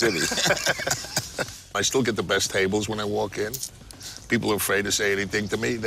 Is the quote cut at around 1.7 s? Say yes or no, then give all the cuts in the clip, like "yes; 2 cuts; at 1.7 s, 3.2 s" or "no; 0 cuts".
yes; 1 cut; at 1.7 s